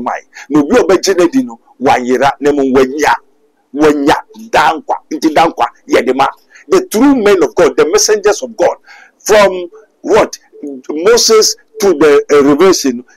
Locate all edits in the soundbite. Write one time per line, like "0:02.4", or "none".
none